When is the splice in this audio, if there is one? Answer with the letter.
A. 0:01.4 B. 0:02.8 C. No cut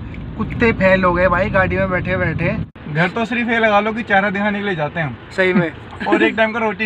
B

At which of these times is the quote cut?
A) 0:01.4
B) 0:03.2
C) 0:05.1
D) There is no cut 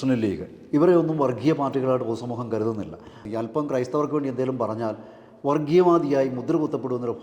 B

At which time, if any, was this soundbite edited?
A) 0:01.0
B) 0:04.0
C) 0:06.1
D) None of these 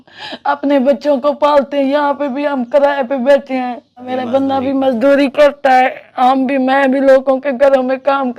B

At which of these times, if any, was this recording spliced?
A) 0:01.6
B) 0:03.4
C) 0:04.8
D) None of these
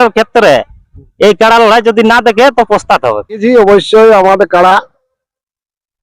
B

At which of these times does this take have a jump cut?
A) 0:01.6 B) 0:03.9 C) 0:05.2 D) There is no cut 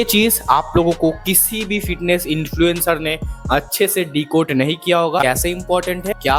C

